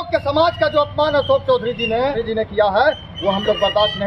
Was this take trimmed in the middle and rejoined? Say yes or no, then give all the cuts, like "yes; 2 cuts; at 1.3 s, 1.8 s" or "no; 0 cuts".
yes; 1 cut; at 2.2 s